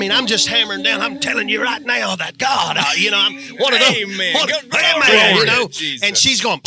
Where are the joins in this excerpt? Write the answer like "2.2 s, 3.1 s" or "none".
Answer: none